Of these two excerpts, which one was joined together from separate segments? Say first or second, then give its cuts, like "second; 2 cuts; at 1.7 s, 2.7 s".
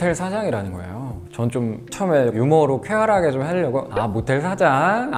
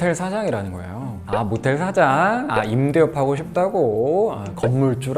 second; 1 cut; at 1.2 s